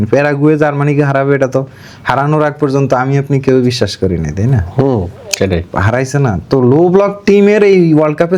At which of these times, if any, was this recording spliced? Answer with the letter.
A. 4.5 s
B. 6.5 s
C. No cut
C